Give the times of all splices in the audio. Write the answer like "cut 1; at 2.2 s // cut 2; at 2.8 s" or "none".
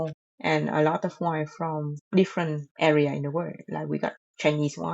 cut 1; at 1.9 s // cut 2; at 2.6 s